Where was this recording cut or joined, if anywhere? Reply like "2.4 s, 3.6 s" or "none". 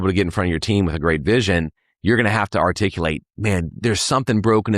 3.8 s